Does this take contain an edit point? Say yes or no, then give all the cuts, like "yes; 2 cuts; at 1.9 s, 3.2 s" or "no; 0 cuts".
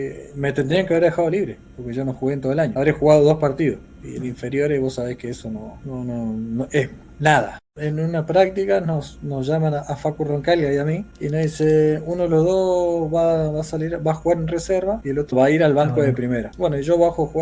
yes; 6 cuts; at 2.7 s, 5.8 s, 7.8 s, 11.1 s, 15.3 s, 16.5 s